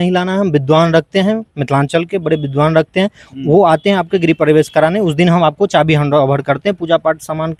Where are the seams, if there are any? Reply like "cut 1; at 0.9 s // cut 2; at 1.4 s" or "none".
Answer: none